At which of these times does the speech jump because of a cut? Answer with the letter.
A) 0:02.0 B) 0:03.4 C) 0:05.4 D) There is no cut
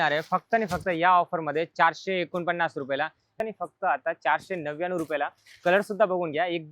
B